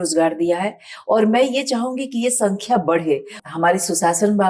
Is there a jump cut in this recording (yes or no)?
yes